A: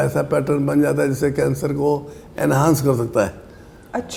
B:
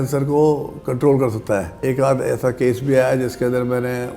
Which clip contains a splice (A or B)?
B